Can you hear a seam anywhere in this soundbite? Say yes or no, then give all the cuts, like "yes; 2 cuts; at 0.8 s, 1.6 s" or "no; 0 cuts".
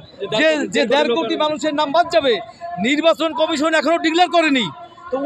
no; 0 cuts